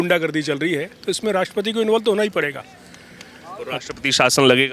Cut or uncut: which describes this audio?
uncut